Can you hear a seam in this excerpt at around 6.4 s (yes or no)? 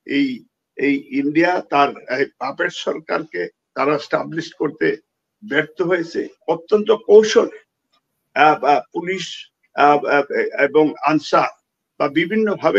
yes